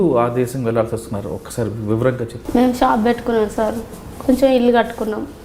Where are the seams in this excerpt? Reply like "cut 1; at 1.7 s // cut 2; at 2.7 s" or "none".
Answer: cut 1; at 2.3 s